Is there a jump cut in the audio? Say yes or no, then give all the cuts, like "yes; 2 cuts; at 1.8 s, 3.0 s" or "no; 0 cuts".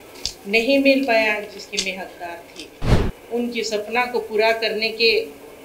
yes; 1 cut; at 3.0 s